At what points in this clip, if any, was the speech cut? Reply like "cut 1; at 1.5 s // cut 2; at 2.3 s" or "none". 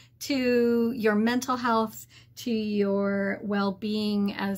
none